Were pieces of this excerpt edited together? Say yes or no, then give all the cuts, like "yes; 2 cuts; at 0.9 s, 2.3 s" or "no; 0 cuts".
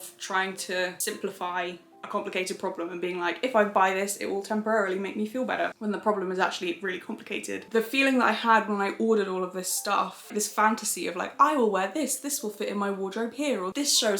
yes; 2 cuts; at 7.7 s, 10.3 s